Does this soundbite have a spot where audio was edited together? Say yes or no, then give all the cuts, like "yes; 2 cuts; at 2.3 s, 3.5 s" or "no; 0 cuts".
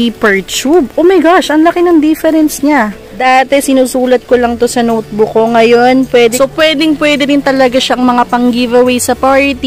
yes; 2 cuts; at 3.0 s, 6.3 s